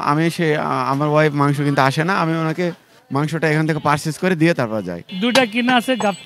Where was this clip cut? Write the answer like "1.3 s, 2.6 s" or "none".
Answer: 5.1 s